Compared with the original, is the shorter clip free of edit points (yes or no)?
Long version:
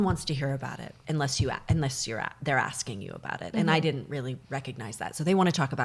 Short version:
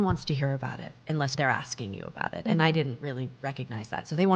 no